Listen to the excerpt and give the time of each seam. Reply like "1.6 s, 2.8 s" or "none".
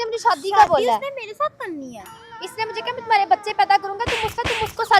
2.5 s